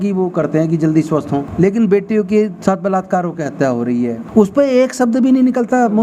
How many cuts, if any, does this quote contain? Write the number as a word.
two